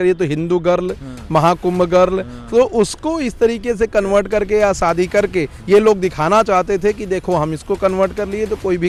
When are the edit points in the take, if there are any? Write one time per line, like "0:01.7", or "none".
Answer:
none

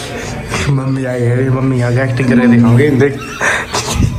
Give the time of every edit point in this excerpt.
none

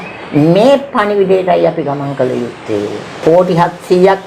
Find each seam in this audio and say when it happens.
0:03.1

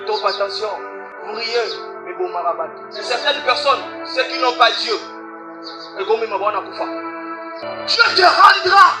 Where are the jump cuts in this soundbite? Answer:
0:01.1
0:02.9
0:07.7

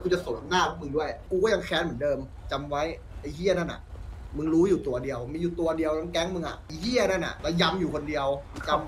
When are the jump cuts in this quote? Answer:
0:01.3
0:06.7
0:07.3

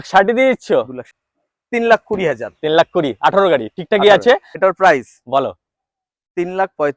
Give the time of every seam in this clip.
0:01.0
0:04.5

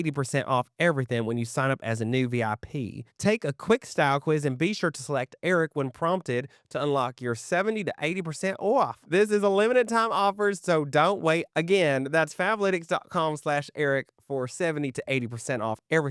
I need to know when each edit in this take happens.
none

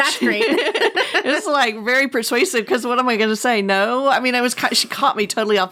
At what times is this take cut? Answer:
none

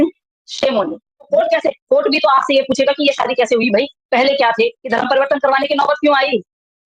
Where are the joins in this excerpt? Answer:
0:01.3
0:04.8

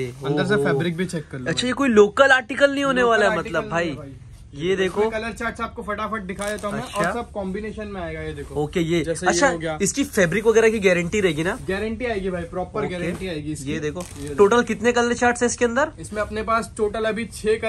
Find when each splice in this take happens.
none

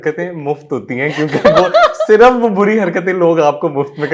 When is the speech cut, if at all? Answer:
none

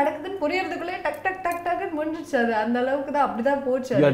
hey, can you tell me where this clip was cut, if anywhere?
none

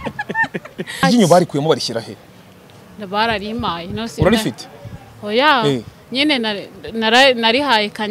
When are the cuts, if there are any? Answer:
0:01.0

